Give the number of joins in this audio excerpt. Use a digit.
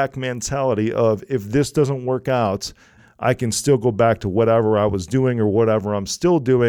1